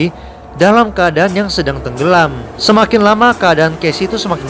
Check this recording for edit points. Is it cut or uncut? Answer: cut